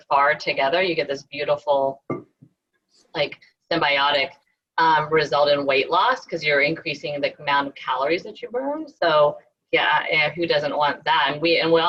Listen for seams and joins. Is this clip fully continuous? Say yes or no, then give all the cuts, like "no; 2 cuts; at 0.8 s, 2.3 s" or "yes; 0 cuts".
yes; 0 cuts